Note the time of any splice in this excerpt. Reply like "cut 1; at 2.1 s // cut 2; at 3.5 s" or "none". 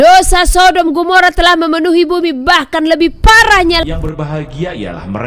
cut 1; at 3.8 s